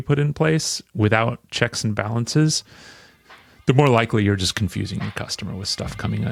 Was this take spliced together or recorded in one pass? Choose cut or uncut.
uncut